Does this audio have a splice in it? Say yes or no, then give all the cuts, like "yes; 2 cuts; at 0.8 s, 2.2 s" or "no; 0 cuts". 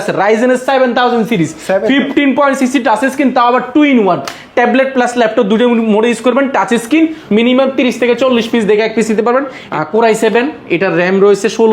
yes; 2 cuts; at 7.2 s, 9.7 s